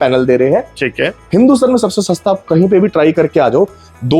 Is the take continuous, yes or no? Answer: yes